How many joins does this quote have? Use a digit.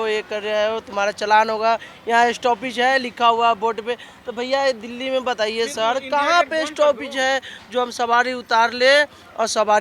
0